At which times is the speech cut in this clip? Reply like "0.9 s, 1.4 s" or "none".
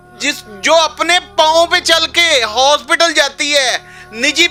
none